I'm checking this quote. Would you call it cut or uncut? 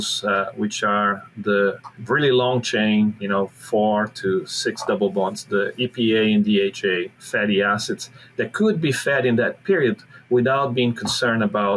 cut